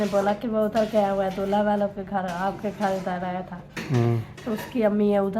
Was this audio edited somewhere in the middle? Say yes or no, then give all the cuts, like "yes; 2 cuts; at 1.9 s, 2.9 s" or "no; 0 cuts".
no; 0 cuts